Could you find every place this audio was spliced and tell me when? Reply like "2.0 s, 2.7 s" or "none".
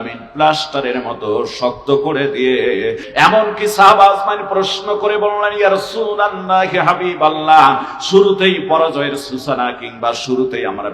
3.0 s